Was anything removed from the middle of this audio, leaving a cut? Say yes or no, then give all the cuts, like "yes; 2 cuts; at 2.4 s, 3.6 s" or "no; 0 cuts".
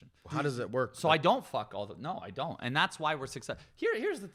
no; 0 cuts